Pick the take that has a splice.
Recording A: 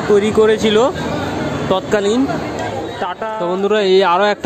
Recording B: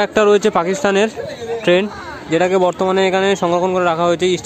A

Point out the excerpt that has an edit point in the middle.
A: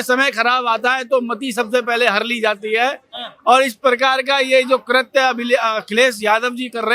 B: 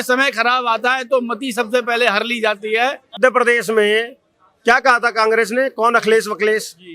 B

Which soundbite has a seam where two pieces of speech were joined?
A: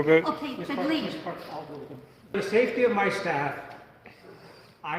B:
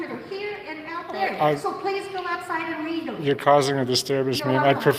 A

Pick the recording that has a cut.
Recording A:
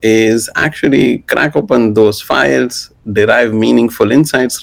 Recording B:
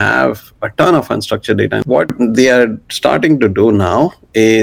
B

